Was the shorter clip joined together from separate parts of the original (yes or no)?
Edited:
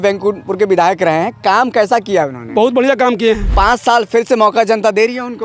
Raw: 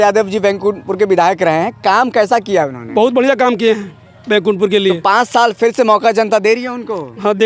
yes